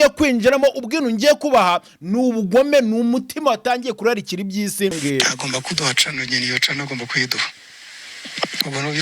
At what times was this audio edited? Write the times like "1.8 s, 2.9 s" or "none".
5.0 s